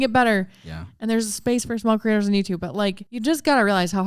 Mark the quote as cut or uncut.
cut